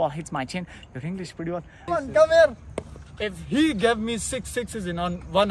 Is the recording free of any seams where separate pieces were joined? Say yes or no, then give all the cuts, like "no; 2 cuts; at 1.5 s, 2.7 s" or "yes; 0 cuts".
no; 1 cut; at 1.9 s